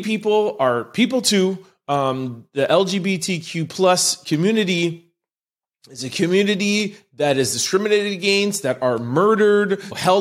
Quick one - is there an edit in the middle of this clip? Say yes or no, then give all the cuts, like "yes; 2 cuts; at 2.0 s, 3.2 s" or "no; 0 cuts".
no; 0 cuts